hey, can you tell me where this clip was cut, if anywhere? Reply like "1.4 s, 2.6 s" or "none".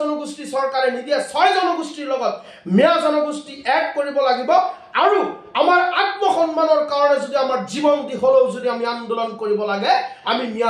none